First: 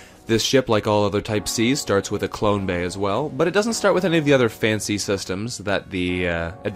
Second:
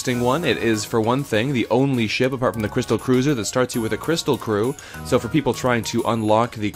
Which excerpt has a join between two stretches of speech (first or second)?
second